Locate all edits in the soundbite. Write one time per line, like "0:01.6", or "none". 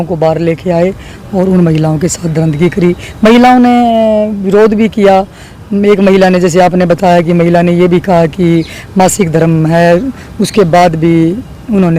none